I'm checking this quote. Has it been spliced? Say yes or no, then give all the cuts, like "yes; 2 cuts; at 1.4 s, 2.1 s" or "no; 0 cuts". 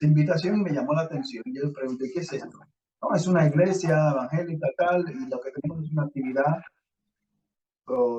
no; 0 cuts